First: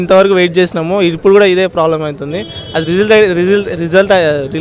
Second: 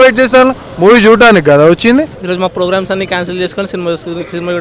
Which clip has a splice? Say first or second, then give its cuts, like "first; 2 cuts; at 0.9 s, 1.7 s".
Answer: second; 1 cut; at 2.2 s